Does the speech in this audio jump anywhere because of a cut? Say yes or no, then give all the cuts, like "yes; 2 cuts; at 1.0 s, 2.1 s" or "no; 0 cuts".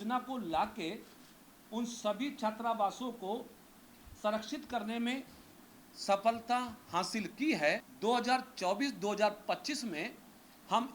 yes; 1 cut; at 7.9 s